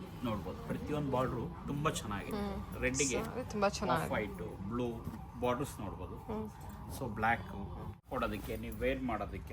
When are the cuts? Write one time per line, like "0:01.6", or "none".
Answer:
0:08.0